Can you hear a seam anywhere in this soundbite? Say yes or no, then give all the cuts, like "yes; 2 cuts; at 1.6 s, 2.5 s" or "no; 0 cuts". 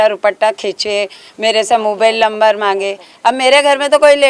no; 0 cuts